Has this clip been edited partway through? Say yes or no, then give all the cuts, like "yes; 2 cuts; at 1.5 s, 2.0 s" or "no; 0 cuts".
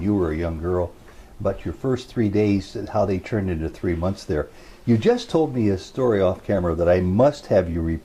no; 0 cuts